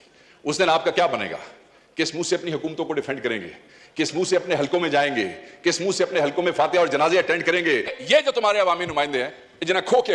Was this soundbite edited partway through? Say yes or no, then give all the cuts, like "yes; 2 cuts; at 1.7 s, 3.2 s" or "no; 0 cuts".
yes; 1 cut; at 8.0 s